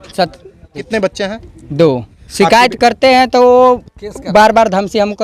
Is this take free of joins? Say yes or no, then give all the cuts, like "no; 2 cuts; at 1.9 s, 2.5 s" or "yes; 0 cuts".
no; 2 cuts; at 0.9 s, 2.2 s